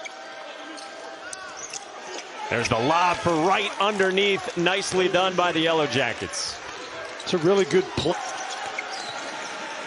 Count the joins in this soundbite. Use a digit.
1